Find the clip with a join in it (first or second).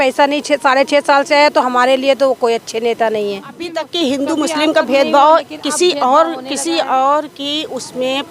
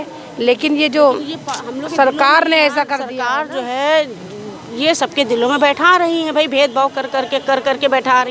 first